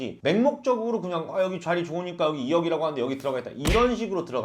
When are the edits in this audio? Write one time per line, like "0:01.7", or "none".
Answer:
none

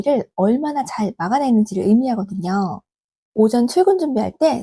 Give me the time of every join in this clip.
none

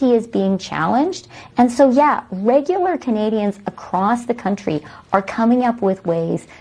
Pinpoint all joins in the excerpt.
0:04.9

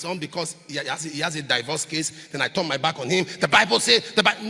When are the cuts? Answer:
none

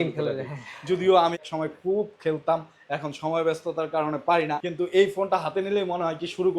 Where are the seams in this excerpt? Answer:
0:01.4
0:04.6

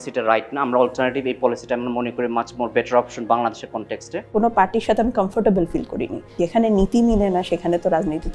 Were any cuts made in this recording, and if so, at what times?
0:04.3
0:06.4

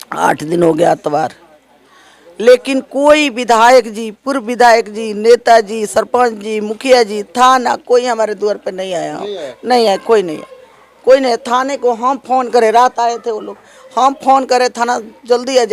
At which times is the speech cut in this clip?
none

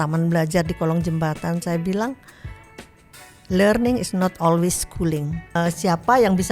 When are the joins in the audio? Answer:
0:05.6

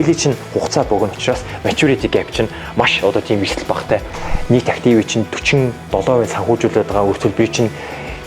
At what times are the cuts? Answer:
0:04.1

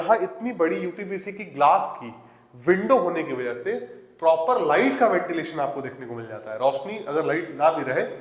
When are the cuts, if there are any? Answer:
none

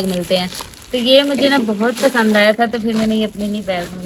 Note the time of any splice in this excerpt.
none

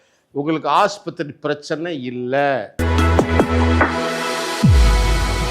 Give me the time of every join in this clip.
0:02.7

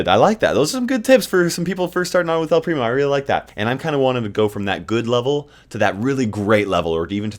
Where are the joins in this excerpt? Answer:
0:03.5

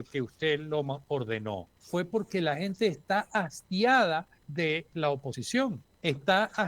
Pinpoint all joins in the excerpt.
0:01.7
0:04.4
0:05.4

